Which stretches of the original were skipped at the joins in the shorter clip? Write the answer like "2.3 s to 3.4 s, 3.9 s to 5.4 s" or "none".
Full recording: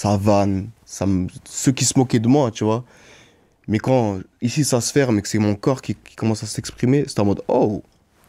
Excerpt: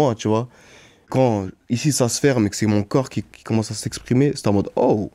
3.5 s to 3.8 s

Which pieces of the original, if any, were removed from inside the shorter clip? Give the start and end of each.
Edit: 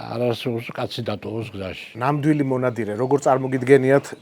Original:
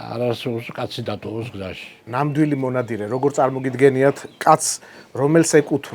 1.8 s to 1.9 s

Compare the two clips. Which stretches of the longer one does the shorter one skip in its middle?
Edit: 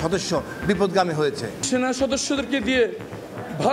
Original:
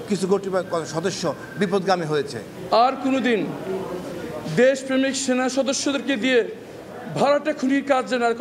2.5 s to 5.2 s

